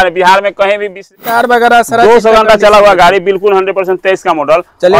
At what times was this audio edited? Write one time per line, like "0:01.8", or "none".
0:01.2